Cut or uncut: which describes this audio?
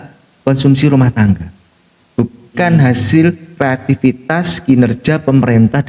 uncut